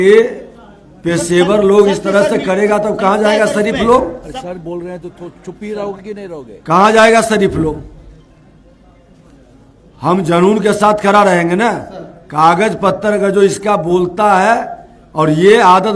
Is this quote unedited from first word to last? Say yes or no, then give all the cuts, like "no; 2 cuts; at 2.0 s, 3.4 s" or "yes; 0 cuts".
yes; 0 cuts